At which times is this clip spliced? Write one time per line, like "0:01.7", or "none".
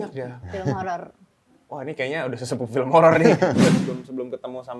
0:03.9